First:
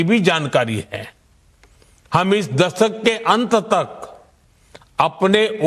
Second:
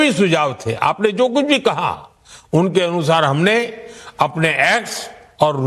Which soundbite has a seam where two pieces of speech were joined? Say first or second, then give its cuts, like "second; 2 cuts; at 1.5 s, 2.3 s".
first; 1 cut; at 2.5 s